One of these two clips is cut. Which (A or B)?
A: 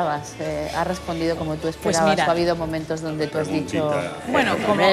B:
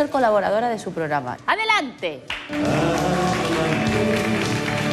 B